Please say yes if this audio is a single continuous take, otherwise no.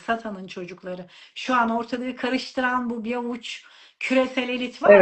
yes